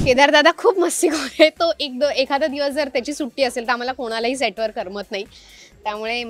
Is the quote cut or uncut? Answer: uncut